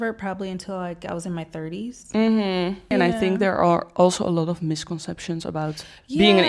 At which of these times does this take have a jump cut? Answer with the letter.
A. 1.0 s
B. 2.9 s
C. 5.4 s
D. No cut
B